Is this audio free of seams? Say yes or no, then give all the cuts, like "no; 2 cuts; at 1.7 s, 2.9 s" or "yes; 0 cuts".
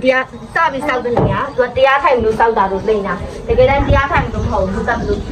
yes; 0 cuts